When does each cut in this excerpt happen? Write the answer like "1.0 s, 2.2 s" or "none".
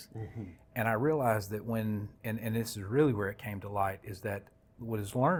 none